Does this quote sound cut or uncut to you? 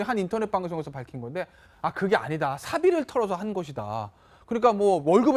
uncut